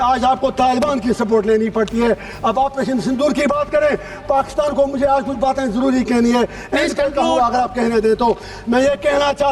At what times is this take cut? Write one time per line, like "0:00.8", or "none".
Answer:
none

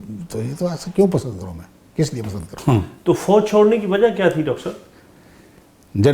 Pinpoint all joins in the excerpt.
0:02.5

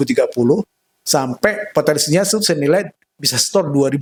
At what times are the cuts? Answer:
none

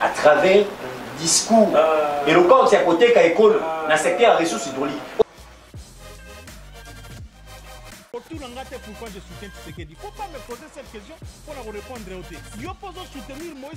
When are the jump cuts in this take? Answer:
0:05.2

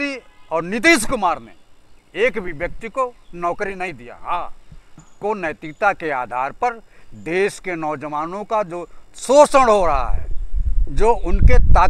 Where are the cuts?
0:05.1

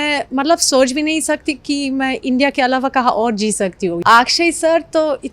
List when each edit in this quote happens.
0:04.0

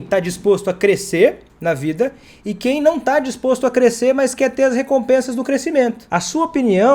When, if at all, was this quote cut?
0:06.0

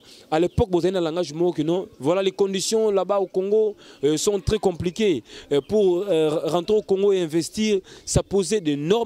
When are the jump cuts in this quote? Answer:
none

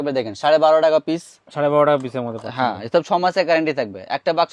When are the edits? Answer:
none

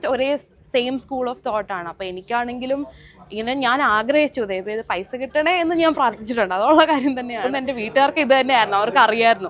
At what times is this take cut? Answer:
0:07.5

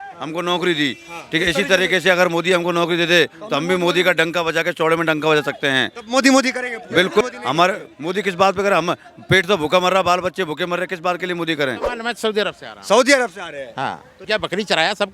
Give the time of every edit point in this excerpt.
0:07.2
0:11.9
0:14.1

